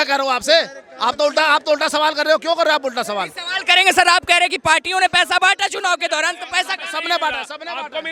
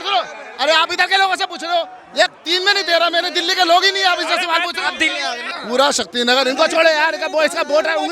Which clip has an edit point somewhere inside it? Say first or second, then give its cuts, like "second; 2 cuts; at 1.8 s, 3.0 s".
second; 2 cuts; at 2.0 s, 5.4 s